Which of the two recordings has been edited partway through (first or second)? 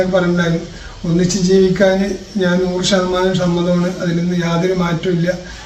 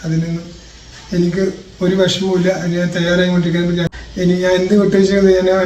second